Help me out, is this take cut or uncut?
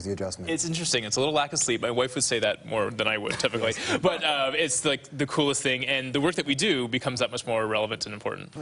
cut